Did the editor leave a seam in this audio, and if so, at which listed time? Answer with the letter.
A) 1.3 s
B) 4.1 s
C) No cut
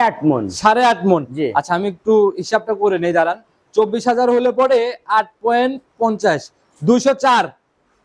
C